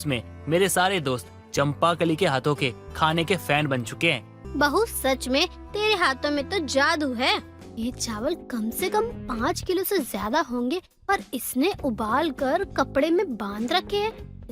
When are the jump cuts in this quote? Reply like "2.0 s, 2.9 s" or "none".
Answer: 4.4 s, 7.6 s